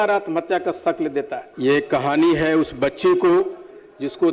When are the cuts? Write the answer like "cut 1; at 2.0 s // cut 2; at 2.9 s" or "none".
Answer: cut 1; at 1.4 s